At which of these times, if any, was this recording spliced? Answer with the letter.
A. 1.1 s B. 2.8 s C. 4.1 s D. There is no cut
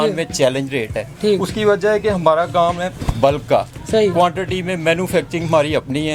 D